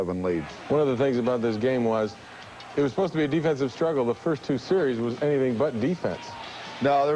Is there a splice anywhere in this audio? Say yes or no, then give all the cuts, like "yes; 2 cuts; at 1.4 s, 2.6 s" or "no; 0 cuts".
yes; 1 cut; at 3.4 s